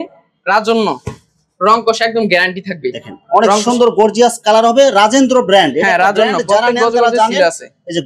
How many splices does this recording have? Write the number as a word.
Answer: zero